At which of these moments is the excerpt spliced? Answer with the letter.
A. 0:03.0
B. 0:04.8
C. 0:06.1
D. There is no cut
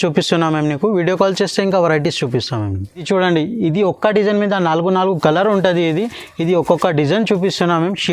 D